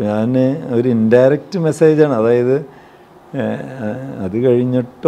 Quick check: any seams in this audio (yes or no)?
no